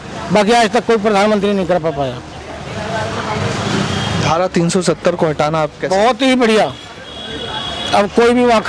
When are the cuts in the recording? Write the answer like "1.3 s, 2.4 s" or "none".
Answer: none